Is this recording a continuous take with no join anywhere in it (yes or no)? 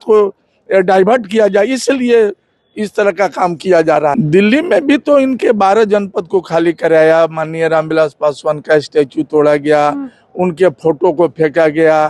no